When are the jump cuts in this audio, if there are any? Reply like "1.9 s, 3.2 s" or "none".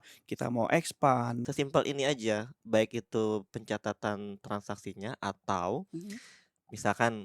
1.4 s

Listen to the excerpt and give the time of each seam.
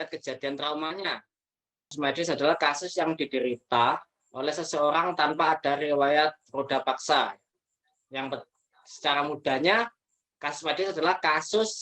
1.9 s

